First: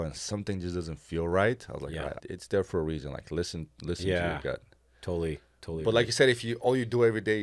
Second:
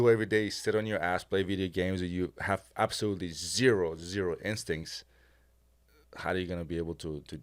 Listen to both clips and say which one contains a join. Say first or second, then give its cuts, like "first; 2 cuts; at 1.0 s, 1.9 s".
first; 1 cut; at 2.2 s